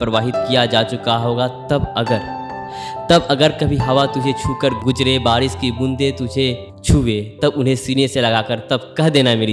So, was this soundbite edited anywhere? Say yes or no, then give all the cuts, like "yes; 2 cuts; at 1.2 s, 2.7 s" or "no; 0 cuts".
yes; 2 cuts; at 4.8 s, 6.7 s